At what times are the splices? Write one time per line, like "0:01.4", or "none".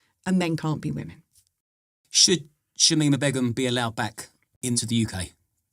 0:01.4